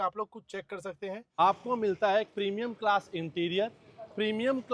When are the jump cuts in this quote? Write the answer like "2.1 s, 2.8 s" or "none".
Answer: 1.4 s